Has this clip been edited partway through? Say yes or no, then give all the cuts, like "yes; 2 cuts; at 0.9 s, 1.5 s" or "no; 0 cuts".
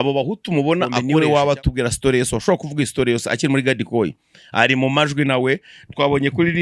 yes; 1 cut; at 1.0 s